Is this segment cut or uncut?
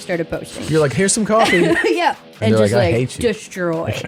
uncut